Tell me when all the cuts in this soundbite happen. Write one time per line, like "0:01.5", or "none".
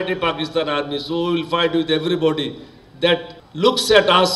0:03.4

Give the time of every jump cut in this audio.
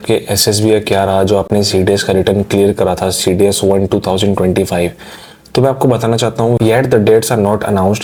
none

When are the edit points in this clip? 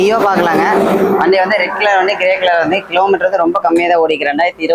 none

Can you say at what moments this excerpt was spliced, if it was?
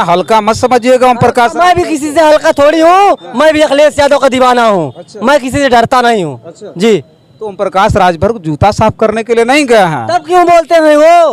none

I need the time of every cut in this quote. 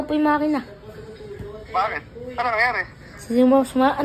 0:01.1

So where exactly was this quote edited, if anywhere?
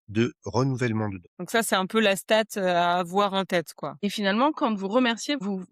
0:04.0

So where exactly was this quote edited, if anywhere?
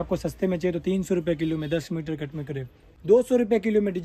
0:02.9

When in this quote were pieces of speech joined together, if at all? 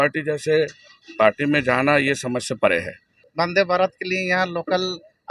0:03.2

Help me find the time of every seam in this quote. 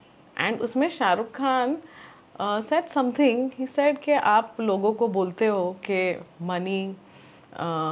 none

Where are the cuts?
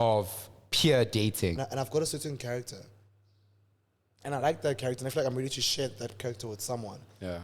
0:01.6

